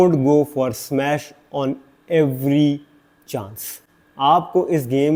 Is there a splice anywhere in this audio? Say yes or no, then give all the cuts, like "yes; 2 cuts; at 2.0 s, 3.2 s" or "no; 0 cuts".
no; 0 cuts